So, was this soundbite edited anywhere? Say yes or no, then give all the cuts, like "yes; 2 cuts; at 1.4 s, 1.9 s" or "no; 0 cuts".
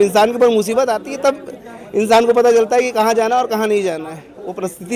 no; 0 cuts